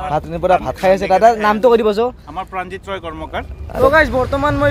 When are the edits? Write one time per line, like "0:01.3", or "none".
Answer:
0:03.8